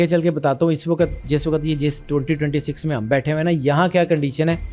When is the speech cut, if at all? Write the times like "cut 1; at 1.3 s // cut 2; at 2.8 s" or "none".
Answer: none

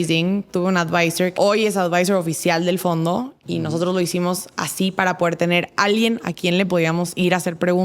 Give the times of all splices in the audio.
cut 1; at 1.3 s

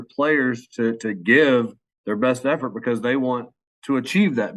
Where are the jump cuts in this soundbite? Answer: none

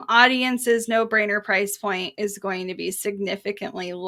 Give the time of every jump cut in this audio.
none

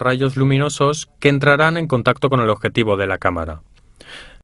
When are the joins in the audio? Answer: cut 1; at 1.6 s

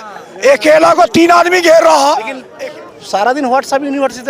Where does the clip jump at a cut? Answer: cut 1; at 2.4 s

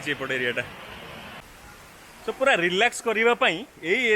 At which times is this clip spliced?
cut 1; at 1.4 s

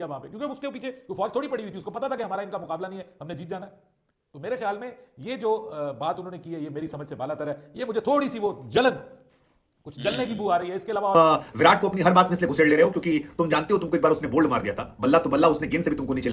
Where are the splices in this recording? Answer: cut 1; at 11.1 s

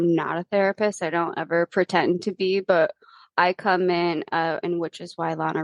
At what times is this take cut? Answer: none

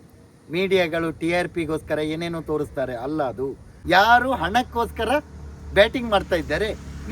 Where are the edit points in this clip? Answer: cut 1; at 3.7 s

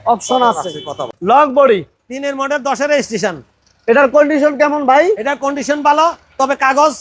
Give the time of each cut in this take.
cut 1; at 1.1 s

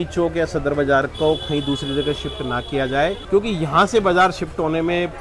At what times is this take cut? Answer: cut 1; at 3.2 s

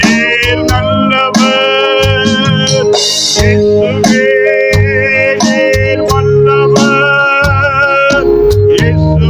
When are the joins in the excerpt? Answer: none

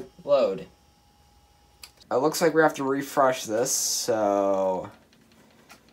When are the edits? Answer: cut 1; at 1.9 s

